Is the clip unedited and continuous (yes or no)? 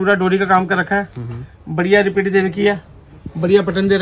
yes